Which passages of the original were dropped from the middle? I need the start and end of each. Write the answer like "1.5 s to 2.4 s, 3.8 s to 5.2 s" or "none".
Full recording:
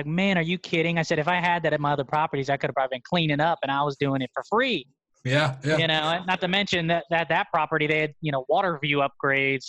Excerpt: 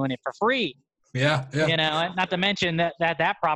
none

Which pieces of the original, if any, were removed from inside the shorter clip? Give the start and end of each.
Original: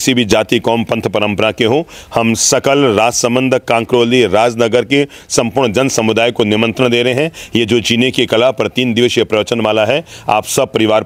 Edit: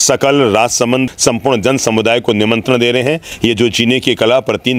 3.5 s to 5.2 s

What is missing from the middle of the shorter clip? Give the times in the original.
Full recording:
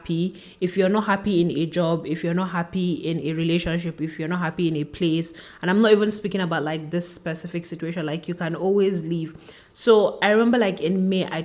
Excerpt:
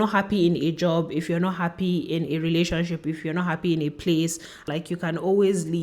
5.6 s to 8.0 s

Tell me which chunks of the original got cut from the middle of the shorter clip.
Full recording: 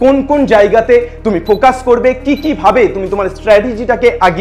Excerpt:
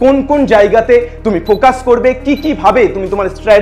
none

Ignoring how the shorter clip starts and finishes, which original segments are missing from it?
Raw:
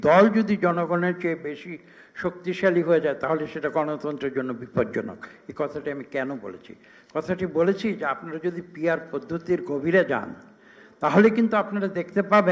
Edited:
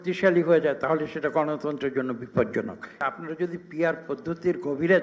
5.4 s to 8.0 s

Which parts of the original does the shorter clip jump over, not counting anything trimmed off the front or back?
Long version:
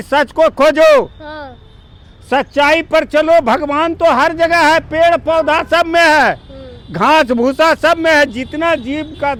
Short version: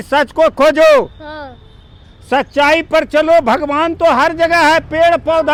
none

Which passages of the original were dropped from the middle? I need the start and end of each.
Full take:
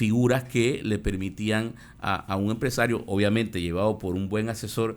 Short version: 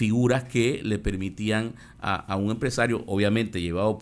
none

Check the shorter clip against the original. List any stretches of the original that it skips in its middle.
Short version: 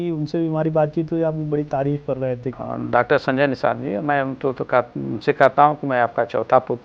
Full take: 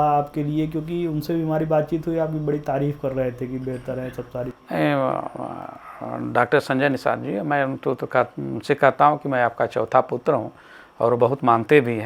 3.5 s to 5.9 s

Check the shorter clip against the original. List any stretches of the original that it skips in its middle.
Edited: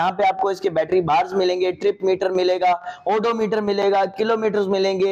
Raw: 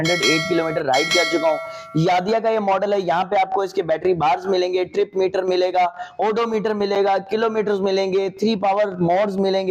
none

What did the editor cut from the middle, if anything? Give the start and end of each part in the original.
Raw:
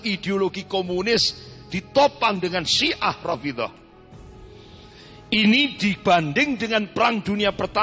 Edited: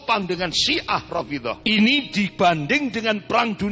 3.7 s to 5.2 s

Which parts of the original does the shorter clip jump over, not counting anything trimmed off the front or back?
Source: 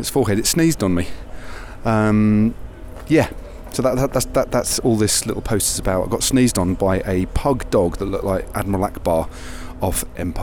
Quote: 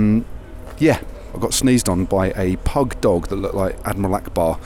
3.7 s to 6.1 s

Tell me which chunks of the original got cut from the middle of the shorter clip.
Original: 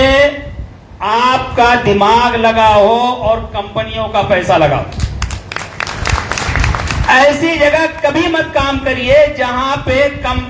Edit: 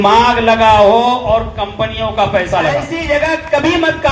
4.9 s to 7.5 s

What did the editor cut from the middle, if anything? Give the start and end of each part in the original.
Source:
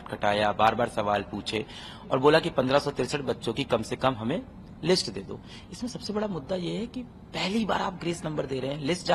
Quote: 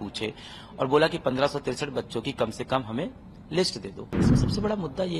5.4 s to 5.6 s

